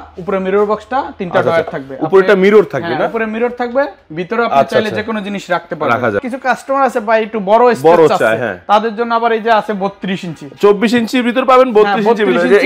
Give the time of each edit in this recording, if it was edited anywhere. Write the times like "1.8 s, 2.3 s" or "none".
6.2 s